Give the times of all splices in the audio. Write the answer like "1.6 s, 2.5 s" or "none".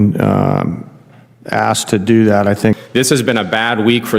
2.8 s